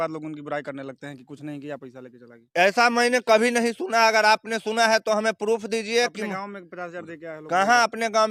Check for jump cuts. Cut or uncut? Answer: uncut